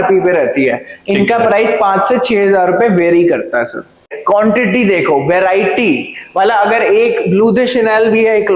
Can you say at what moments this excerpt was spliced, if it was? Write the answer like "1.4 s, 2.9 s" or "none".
4.1 s